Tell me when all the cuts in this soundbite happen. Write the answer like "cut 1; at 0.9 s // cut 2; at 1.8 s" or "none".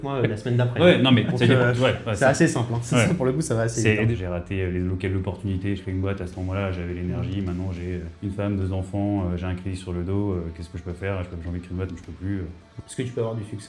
cut 1; at 4.1 s // cut 2; at 5.8 s // cut 3; at 8.1 s // cut 4; at 12.8 s

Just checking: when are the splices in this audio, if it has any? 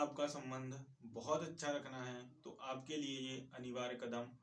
none

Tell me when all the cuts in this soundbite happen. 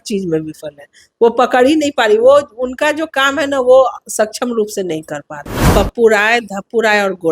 cut 1; at 5.6 s

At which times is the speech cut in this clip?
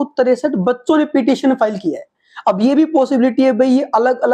none

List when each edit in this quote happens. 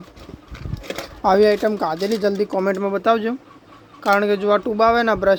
none

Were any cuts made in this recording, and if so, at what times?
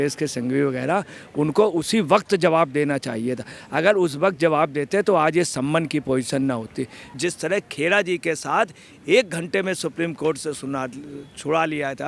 cut 1; at 7.2 s

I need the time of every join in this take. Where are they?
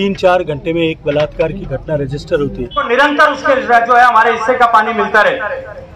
cut 1; at 2.9 s

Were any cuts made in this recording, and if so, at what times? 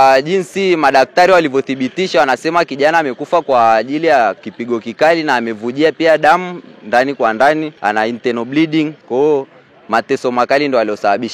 cut 1; at 4.5 s // cut 2; at 7.7 s // cut 3; at 9.0 s

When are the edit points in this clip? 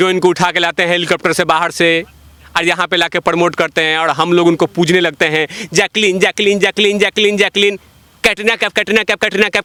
none

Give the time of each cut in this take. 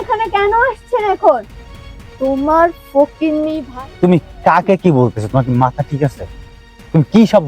cut 1; at 3.6 s

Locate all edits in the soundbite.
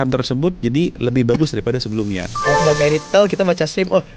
cut 1; at 2.5 s

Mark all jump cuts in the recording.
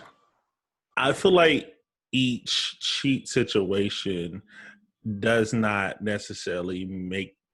none

